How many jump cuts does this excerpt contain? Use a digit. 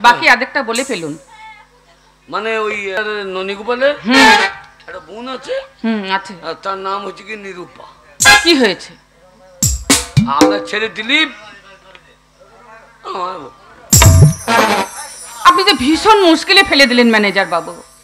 1